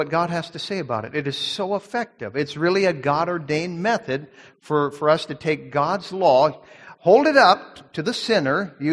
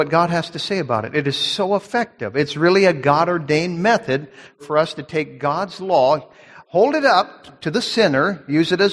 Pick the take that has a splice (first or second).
second